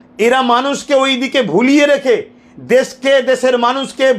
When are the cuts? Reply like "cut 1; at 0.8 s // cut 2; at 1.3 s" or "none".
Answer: none